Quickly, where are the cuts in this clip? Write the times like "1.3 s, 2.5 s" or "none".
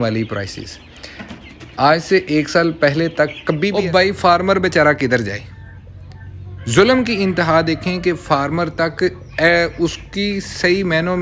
3.7 s